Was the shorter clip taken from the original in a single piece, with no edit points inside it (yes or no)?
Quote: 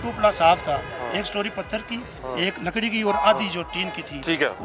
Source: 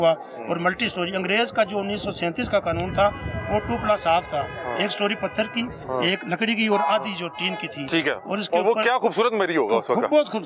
yes